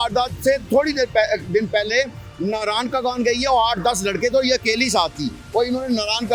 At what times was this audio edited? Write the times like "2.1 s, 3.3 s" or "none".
none